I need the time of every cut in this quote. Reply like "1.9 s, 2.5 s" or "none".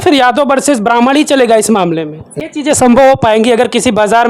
2.3 s